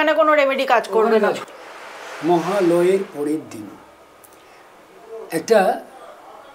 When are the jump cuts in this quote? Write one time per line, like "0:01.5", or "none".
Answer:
0:01.4